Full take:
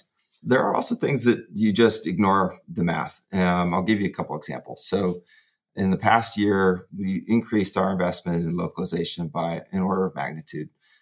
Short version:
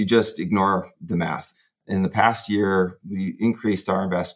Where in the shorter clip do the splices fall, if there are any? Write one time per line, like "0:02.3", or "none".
0:01.5